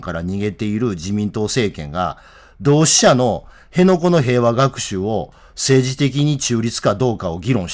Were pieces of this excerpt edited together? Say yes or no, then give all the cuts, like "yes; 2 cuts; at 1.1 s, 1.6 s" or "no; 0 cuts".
no; 0 cuts